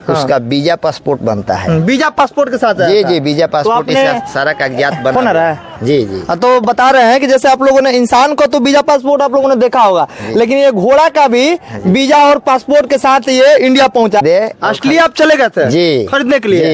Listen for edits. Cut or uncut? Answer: cut